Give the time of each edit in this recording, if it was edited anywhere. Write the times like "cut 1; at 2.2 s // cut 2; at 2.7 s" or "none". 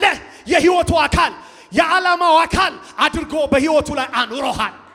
none